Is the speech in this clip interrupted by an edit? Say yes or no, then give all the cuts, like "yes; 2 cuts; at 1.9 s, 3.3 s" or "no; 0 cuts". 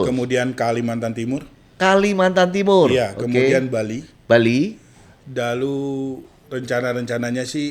no; 0 cuts